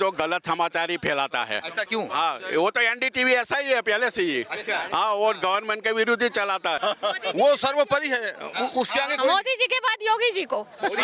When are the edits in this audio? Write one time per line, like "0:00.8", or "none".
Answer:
0:06.8